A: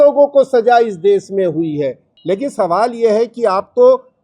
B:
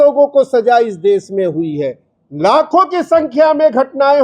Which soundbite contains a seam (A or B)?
A